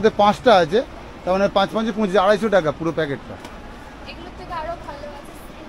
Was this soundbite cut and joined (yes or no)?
no